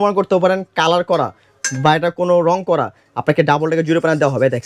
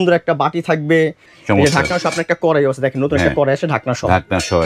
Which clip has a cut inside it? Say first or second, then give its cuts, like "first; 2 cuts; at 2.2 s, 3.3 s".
second; 1 cut; at 1.3 s